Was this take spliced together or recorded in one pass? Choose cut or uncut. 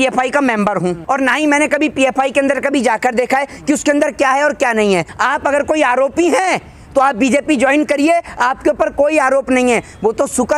cut